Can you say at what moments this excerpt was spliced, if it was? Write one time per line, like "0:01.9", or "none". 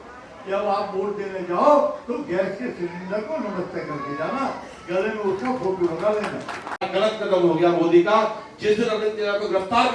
0:06.8